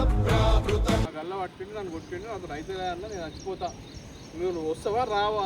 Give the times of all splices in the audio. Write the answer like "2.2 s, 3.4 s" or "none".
1.1 s